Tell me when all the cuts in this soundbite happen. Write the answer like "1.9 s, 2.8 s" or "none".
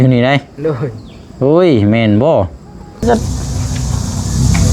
3.0 s